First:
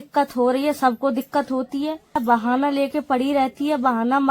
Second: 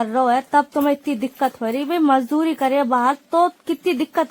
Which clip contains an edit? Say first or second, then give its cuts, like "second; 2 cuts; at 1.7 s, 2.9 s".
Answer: first; 1 cut; at 2.2 s